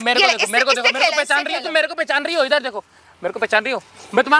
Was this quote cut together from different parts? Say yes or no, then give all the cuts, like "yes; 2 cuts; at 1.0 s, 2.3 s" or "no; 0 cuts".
no; 0 cuts